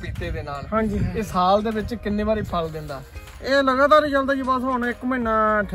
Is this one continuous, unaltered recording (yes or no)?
yes